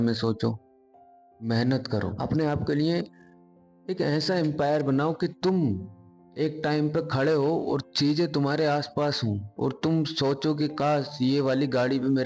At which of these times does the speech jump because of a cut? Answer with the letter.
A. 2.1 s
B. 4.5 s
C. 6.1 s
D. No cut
A